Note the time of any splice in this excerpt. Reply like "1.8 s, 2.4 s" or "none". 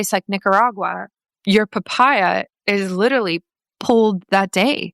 1.3 s, 3.7 s